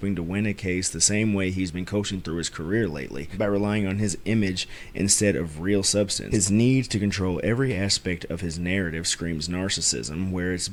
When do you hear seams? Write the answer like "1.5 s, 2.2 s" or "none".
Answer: none